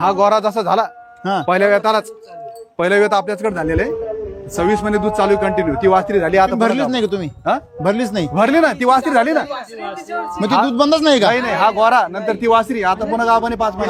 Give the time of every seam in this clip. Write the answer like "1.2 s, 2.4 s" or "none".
none

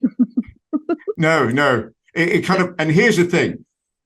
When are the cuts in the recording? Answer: 1.1 s

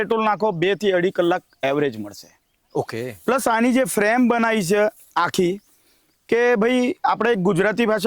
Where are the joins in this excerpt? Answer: none

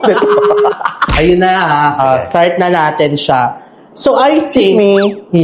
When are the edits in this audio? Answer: none

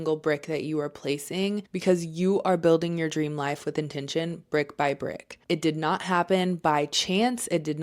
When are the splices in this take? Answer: 1.7 s

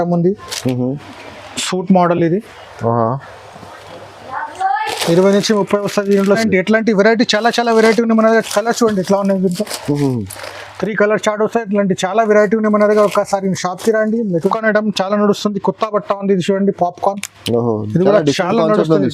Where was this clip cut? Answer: 6.4 s, 14.4 s

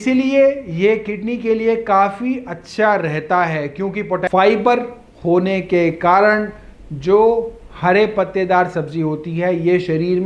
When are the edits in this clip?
4.2 s

